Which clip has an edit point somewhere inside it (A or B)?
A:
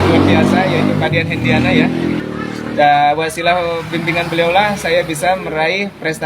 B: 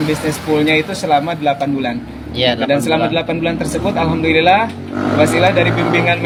A